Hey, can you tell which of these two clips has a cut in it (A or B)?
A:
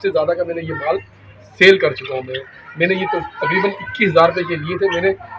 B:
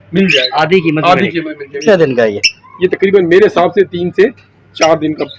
B